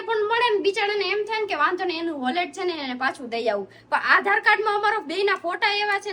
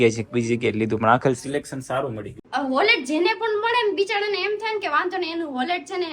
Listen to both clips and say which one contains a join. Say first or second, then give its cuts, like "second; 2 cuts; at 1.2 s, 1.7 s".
second; 1 cut; at 2.4 s